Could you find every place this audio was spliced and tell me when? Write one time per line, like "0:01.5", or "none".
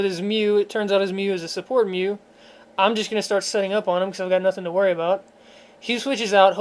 0:01.0